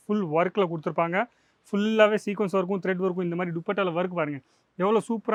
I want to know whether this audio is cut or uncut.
uncut